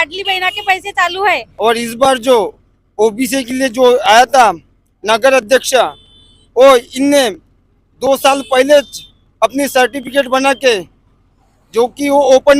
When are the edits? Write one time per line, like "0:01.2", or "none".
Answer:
0:01.5